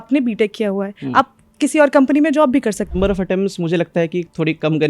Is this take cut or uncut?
cut